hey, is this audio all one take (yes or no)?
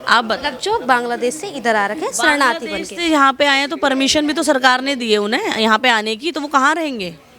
yes